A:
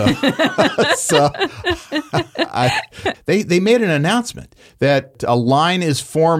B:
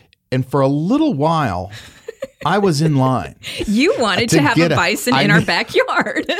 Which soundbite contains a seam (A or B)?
A